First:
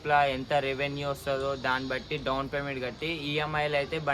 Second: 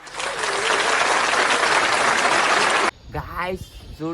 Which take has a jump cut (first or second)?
second